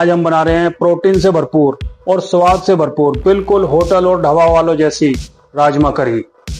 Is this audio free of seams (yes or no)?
yes